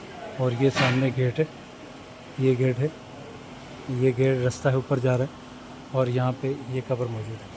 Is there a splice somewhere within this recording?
no; 0 cuts

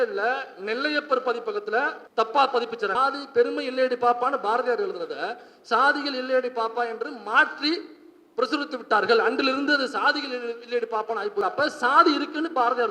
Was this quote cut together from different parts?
yes; 3 cuts; at 2.0 s, 2.9 s, 11.4 s

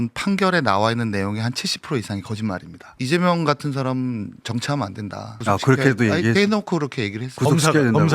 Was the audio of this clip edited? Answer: yes; 1 cut; at 2.9 s

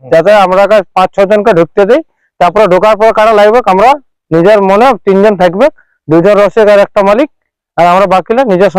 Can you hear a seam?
no; 0 cuts

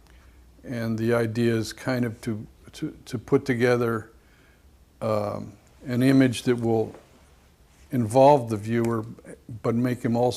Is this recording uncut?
no; 1 cut; at 5.6 s

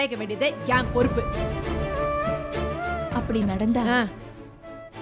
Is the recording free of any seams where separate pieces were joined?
yes; 0 cuts

